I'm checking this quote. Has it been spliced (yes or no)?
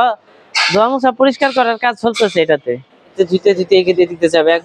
yes